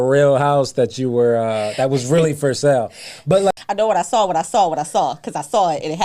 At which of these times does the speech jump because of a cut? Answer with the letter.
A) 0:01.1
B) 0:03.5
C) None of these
B